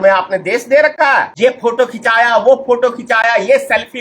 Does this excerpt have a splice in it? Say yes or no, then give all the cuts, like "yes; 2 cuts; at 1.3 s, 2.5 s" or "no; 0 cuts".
yes; 1 cut; at 1.3 s